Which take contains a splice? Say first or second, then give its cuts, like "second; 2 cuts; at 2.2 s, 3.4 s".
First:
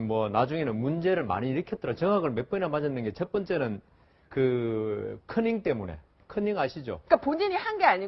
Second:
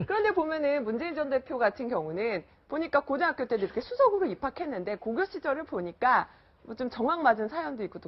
second; 1 cut; at 3.2 s